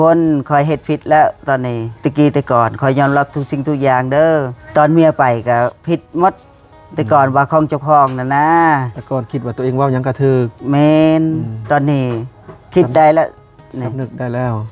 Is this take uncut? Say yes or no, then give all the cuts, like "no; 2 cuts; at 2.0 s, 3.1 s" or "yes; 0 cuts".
no; 3 cuts; at 1.9 s, 4.6 s, 9.0 s